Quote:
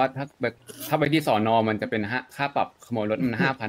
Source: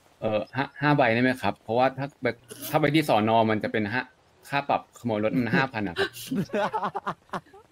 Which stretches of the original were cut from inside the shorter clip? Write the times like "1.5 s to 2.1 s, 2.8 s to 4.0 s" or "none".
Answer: 4.1 s to 4.4 s